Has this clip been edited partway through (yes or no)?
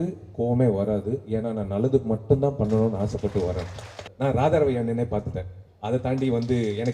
yes